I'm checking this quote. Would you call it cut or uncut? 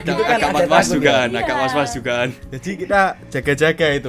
uncut